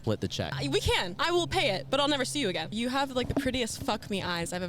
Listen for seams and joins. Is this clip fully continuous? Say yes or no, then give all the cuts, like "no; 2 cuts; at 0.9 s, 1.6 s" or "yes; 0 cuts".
no; 2 cuts; at 1.0 s, 2.8 s